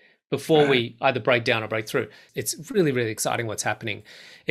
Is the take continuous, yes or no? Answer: no